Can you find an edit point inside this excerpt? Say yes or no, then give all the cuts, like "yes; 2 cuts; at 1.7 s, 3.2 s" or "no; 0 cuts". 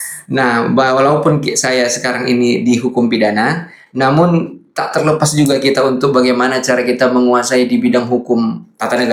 no; 0 cuts